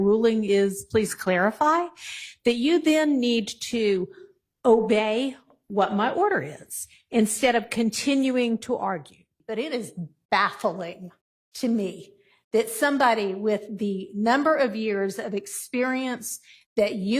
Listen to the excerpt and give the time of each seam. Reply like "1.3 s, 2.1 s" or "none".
9.3 s